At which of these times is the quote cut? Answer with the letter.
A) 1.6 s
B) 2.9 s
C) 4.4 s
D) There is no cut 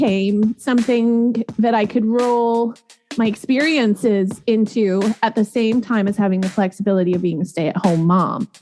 D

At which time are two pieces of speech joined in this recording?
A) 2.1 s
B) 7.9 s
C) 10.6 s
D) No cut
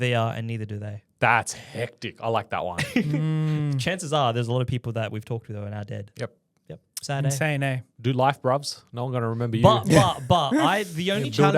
B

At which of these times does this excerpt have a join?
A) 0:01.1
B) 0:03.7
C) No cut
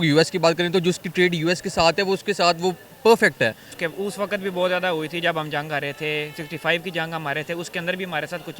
B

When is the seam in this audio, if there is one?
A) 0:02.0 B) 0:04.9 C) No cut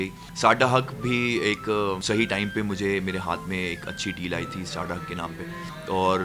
A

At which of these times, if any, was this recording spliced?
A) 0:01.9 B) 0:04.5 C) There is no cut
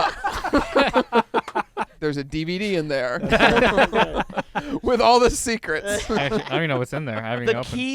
A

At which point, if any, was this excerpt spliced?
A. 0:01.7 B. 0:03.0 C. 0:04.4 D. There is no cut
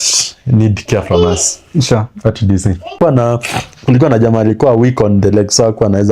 B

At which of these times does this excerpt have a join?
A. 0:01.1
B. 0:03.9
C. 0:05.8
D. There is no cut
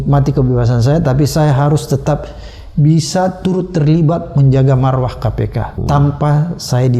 C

